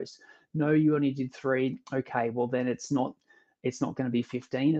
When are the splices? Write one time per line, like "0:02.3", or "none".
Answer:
none